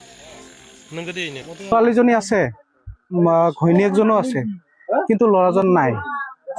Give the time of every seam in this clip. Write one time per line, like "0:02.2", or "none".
0:01.7